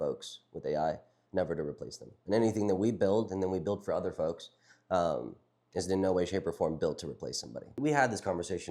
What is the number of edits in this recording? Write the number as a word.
one